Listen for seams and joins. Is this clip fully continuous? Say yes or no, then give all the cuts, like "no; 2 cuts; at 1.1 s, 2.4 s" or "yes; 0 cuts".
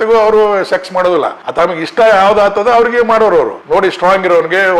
no; 2 cuts; at 1.4 s, 3.6 s